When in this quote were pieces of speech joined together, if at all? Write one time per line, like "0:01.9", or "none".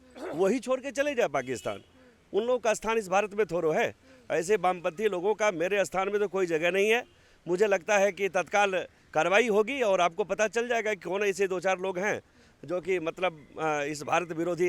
none

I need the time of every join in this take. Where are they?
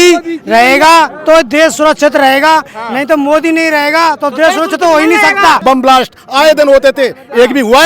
0:05.6

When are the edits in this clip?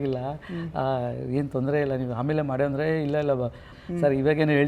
0:03.7

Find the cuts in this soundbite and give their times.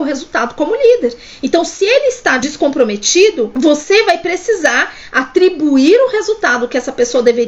0:02.4
0:03.5

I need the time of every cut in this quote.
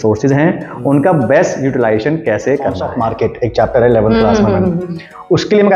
0:02.9

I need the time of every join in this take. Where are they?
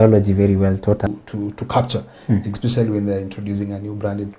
0:01.0

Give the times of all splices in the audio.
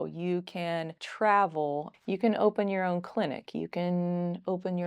0:01.0
0:01.9

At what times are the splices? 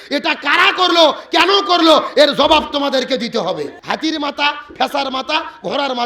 0:03.7

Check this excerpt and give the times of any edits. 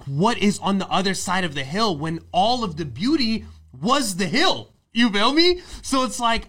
none

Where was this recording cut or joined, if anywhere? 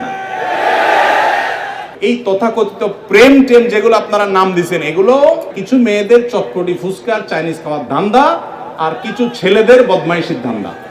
0:01.8
0:05.5

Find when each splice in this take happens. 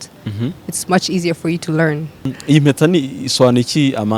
0:02.3

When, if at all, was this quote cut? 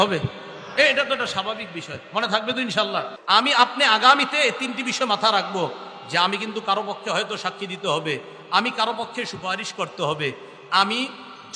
0:03.1

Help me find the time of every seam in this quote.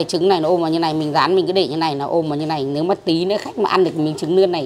none

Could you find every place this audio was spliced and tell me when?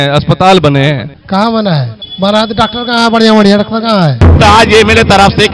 0:01.1
0:02.0
0:04.4

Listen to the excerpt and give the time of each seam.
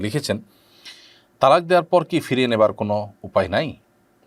none

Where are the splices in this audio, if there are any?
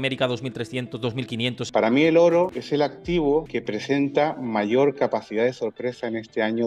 0:01.6
0:02.6
0:03.5

